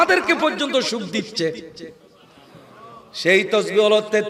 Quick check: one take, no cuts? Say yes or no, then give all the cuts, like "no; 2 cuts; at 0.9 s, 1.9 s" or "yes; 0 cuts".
yes; 0 cuts